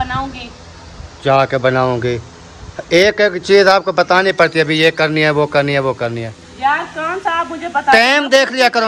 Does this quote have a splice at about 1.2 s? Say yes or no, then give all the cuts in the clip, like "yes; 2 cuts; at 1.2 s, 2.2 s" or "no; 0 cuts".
no; 0 cuts